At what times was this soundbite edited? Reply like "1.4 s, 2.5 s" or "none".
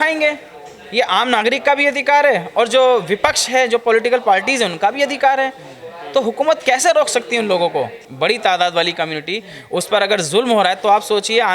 8.0 s